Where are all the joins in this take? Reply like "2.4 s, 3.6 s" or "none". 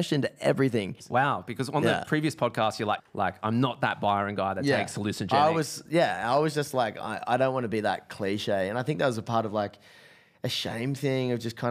1.0 s, 3.0 s